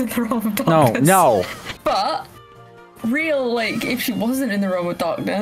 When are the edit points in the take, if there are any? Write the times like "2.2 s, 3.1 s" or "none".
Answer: 1.6 s